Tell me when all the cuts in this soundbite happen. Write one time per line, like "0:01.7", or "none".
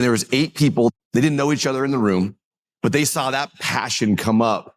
0:00.9